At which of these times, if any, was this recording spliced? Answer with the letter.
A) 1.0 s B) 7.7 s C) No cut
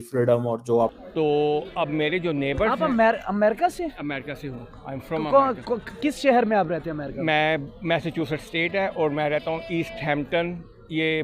A